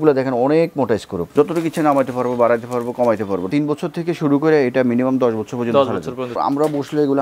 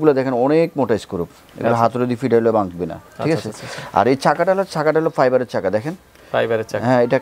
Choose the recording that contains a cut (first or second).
first